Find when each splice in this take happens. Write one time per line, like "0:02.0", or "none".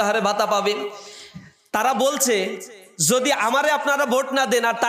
none

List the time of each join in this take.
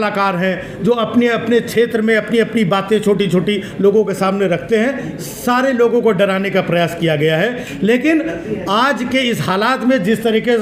none

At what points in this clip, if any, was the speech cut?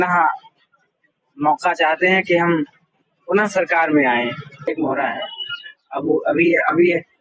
0:04.7

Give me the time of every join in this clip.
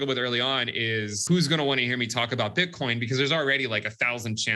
0:01.2

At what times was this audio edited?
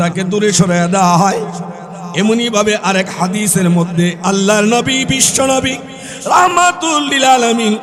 none

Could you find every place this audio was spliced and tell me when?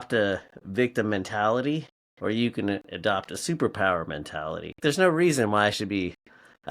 0:04.8

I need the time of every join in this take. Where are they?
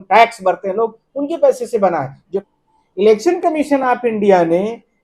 0:02.3

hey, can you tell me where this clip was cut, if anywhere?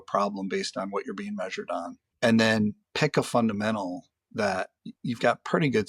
0:02.0
0:02.8
0:04.8

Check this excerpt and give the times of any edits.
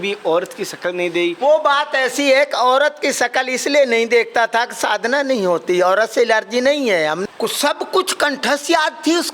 0:07.2

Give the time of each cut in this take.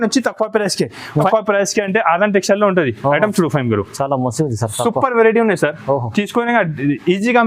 0:01.3

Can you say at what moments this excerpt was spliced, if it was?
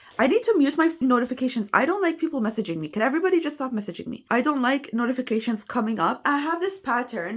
0:01.0
0:04.2

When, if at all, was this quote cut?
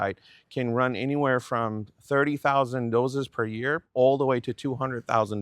0:03.9

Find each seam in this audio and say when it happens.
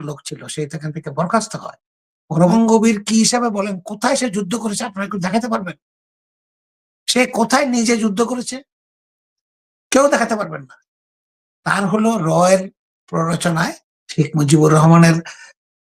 0:02.5

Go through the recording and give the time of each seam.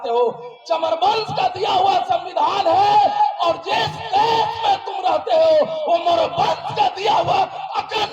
none

